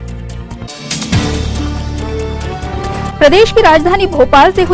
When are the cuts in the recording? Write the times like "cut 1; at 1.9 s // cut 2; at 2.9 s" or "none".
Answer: cut 1; at 2.4 s